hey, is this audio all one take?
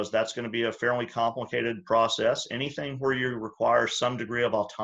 yes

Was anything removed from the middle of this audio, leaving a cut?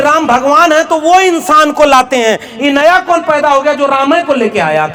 no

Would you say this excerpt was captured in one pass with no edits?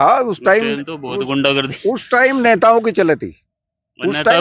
yes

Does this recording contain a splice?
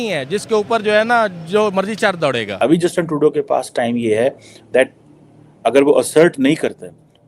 yes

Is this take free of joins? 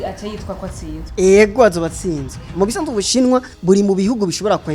no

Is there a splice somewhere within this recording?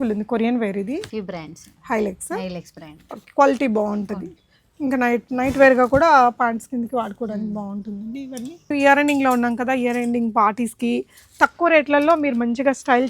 yes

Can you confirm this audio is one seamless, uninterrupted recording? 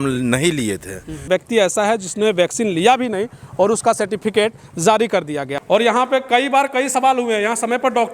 no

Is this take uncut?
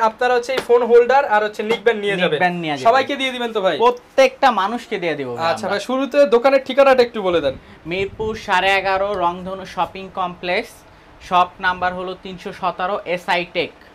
yes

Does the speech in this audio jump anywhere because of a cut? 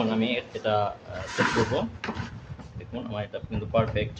no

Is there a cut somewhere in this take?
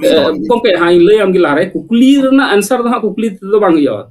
no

